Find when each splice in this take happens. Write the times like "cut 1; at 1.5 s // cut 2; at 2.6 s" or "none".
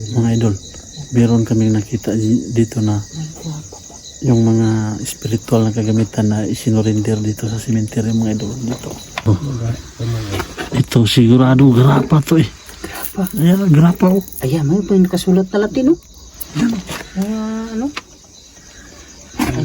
cut 1; at 9.3 s